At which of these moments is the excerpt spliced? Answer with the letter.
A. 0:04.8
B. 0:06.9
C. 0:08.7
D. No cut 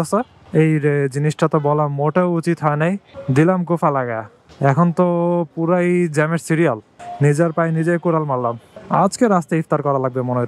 B